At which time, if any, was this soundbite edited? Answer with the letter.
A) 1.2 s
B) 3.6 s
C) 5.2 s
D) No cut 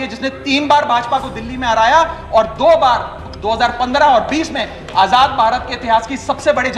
D